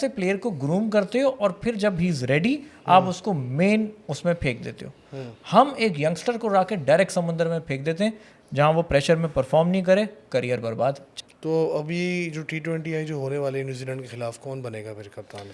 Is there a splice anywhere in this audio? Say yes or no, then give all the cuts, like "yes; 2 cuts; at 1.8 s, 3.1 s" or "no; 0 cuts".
yes; 1 cut; at 11.1 s